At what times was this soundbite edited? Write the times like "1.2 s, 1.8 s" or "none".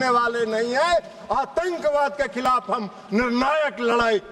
none